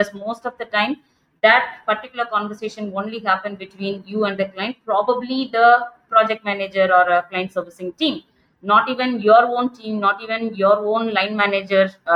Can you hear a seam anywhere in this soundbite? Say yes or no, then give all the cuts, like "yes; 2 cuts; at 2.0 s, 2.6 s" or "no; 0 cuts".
no; 0 cuts